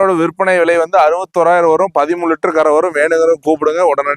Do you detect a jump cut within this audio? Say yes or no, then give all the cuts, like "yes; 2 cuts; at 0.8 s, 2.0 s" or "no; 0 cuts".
no; 0 cuts